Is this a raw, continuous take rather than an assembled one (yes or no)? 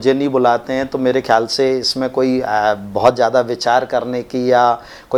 yes